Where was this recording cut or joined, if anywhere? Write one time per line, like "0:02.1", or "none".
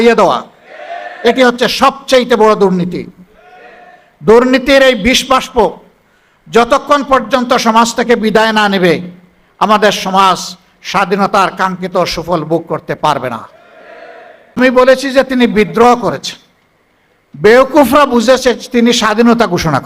0:14.6